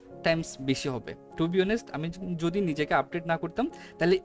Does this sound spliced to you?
yes; 1 cut; at 1.2 s

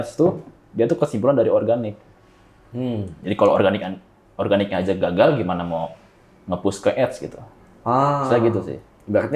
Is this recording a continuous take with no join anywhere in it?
yes; 0 cuts

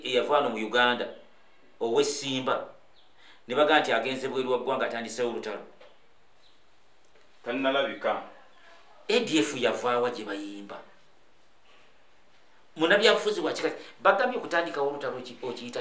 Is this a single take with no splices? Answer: yes; 0 cuts

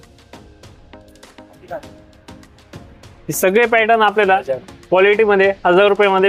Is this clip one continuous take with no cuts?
yes; 0 cuts

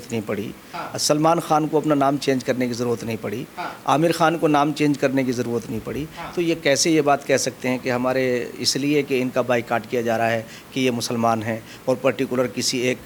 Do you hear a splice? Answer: no; 0 cuts

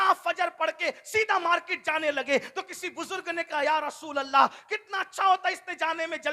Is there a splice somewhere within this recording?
no; 0 cuts

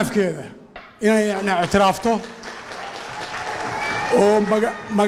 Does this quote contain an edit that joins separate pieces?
no; 0 cuts

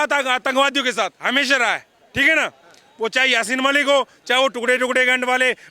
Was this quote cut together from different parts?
no; 0 cuts

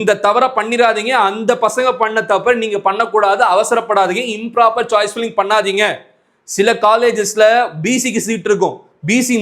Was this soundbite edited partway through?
no; 0 cuts

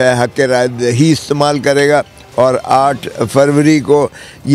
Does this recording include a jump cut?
no; 0 cuts

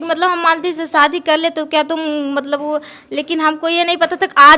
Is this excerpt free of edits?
yes; 0 cuts

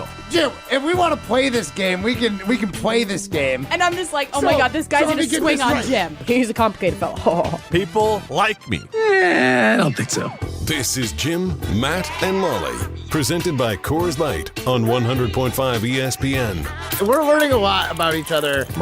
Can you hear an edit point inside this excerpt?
yes; 1 cut; at 16.8 s

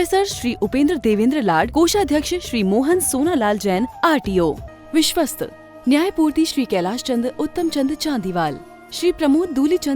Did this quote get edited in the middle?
yes; 1 cut; at 4.7 s

